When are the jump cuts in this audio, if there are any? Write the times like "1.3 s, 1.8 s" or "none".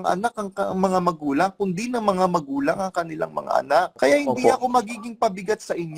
3.9 s